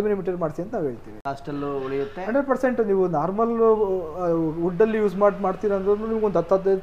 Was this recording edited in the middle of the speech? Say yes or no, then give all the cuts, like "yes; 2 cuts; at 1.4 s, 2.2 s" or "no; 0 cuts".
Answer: no; 0 cuts